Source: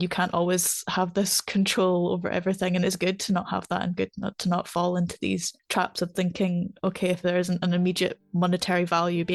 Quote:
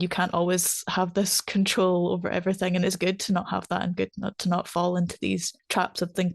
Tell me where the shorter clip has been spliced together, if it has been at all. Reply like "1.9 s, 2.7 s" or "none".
none

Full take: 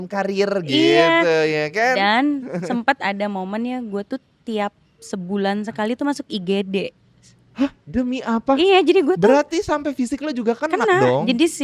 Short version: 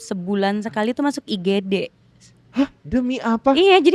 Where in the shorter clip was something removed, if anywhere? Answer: none

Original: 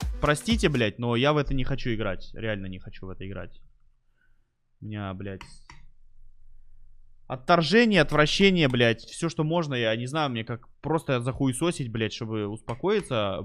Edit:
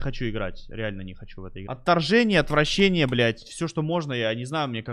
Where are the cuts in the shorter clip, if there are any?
1.6 s

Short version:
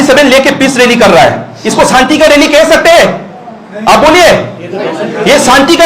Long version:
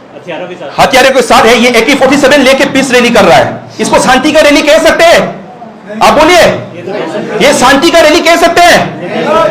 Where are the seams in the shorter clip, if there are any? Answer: none

